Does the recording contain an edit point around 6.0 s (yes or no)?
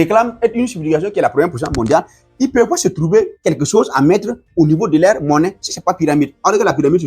no